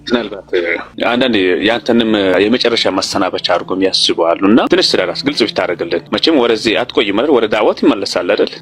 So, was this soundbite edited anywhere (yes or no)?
yes